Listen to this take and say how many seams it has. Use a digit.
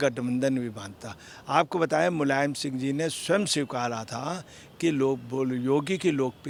0